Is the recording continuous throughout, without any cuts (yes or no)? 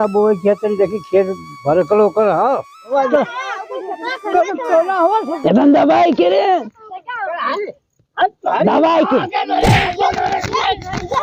no